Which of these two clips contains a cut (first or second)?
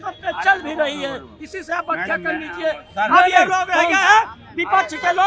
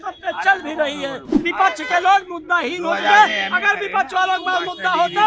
second